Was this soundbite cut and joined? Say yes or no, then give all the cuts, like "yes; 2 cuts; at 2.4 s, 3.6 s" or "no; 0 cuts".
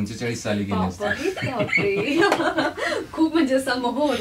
no; 0 cuts